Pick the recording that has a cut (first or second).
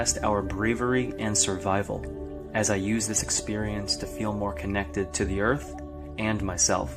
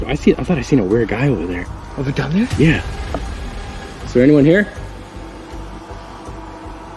second